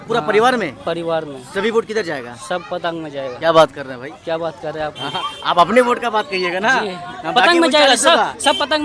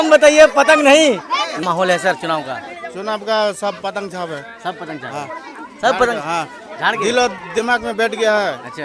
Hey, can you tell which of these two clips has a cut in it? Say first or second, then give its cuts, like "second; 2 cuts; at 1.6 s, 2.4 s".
second; 1 cut; at 1.6 s